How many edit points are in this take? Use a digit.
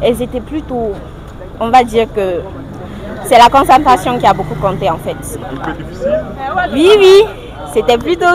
0